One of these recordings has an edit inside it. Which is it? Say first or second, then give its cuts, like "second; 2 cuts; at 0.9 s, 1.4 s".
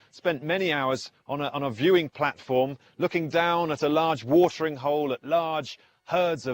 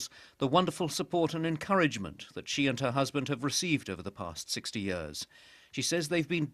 second; 1 cut; at 2.0 s